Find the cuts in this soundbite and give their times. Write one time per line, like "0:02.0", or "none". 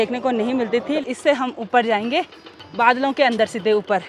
0:00.9